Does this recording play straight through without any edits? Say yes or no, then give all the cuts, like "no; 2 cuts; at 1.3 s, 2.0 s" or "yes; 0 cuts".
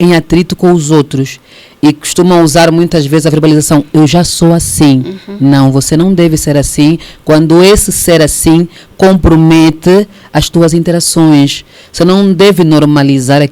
yes; 0 cuts